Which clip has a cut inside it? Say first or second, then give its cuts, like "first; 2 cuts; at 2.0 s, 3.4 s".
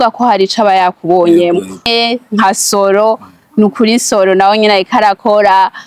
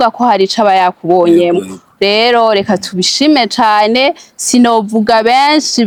first; 1 cut; at 1.8 s